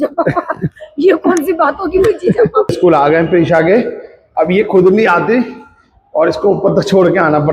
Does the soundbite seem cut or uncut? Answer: cut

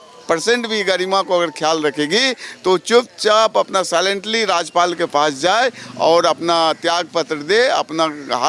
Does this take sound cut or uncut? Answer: uncut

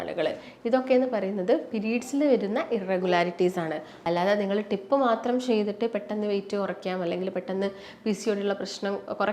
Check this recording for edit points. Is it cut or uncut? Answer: cut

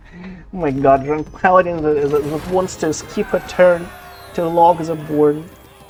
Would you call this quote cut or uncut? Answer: uncut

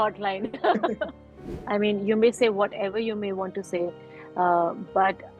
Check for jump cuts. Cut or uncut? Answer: cut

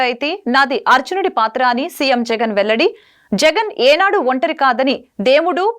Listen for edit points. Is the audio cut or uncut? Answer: uncut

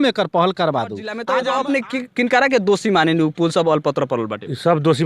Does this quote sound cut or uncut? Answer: cut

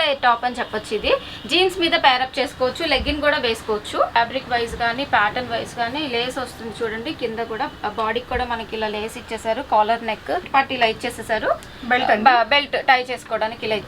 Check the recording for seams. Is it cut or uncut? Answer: cut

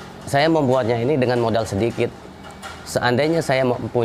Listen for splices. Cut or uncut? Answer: uncut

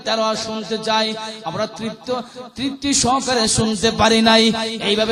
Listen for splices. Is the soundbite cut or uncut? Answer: uncut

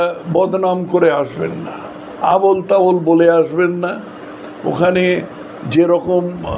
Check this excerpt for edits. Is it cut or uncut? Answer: uncut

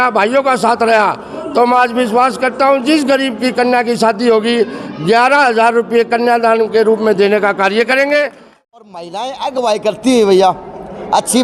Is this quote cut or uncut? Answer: cut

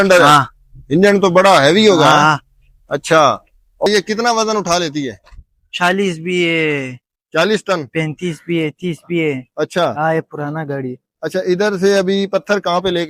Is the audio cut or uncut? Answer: uncut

